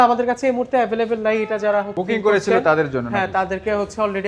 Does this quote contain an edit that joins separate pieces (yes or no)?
no